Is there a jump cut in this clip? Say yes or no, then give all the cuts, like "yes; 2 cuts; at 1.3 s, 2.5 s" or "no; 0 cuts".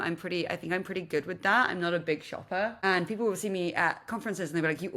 yes; 1 cut; at 2.8 s